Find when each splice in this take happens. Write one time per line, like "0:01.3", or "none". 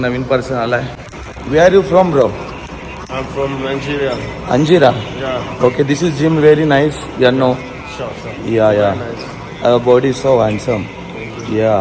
none